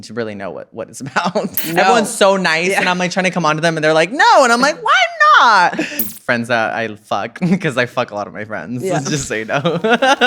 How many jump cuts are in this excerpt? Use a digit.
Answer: 2